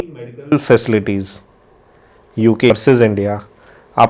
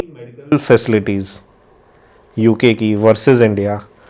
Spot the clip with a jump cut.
first; 1 cut; at 2.7 s

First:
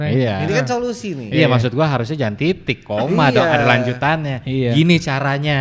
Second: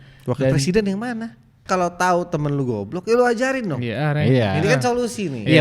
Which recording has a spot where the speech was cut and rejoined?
second; 1 cut; at 1.6 s

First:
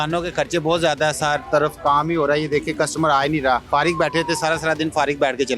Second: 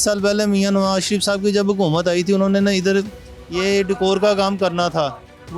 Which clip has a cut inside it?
first; 1 cut; at 3.6 s

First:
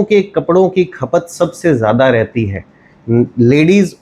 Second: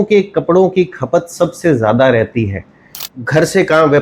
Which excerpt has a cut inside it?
second; 1 cut; at 3.0 s

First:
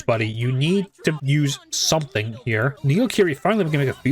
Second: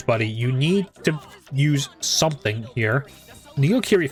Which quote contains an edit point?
first; 2 cuts; at 1.2 s, 2.8 s

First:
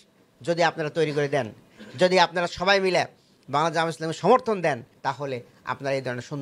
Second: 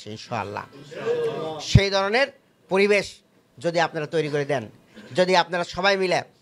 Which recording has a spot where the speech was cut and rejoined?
first; 1 cut; at 4.9 s

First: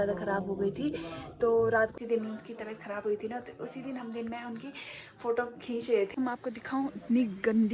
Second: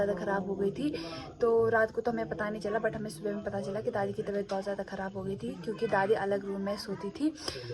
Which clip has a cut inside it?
first; 2 cuts; at 1.9 s, 6.1 s

